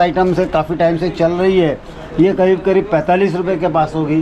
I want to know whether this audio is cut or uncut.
uncut